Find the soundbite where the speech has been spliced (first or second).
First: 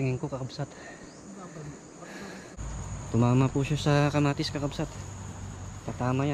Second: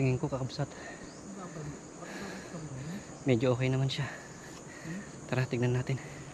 first